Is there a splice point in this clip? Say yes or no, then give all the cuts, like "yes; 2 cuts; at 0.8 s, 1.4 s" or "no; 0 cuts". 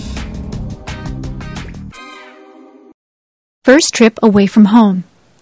yes; 1 cut; at 2.9 s